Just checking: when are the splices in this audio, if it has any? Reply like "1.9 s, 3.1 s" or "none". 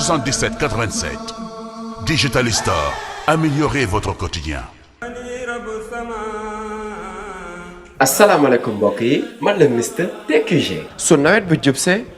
5.0 s